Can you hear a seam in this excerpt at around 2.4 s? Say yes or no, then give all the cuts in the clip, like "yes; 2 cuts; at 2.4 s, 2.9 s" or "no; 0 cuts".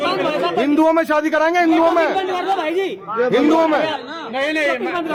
no; 0 cuts